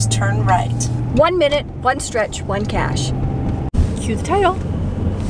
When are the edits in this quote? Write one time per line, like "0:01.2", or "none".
none